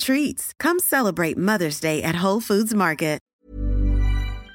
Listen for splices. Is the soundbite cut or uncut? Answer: cut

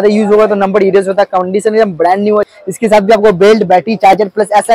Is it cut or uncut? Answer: cut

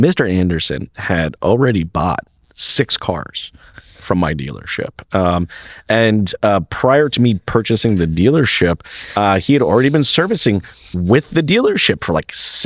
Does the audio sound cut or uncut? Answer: uncut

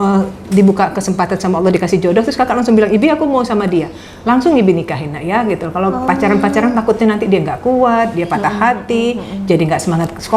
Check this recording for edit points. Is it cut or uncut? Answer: uncut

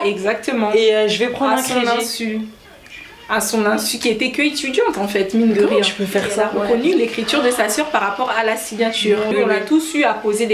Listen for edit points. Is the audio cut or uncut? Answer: cut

